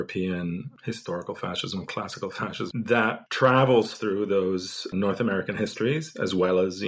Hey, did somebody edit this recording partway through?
yes; 1 cut; at 2.9 s

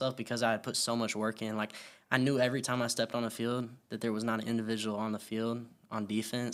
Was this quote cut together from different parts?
no; 0 cuts

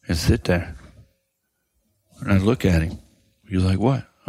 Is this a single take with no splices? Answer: no; 1 cut; at 3.4 s

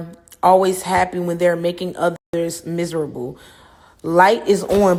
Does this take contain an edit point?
no; 0 cuts

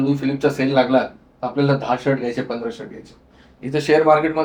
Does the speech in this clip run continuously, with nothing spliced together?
yes; 0 cuts

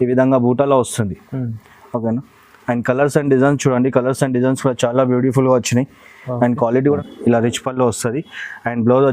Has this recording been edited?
yes; 1 cut; at 7.0 s

